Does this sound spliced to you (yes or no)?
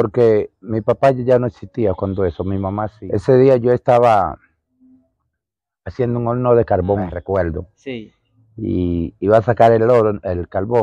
yes